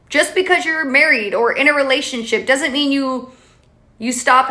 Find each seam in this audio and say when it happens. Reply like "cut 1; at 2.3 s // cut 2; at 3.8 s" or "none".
none